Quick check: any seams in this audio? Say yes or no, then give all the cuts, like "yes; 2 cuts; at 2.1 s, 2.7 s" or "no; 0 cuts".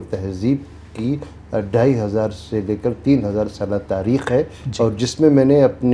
no; 0 cuts